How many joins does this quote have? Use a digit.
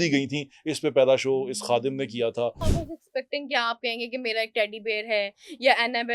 1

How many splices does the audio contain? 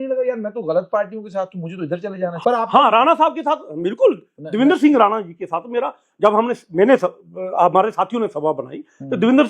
1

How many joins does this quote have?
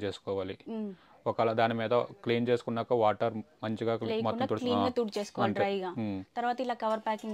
0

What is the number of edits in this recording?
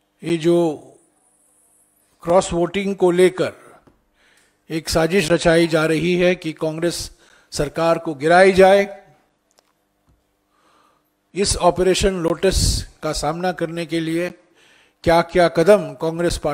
0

